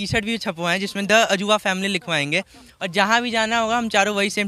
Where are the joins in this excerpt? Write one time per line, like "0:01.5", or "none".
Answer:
none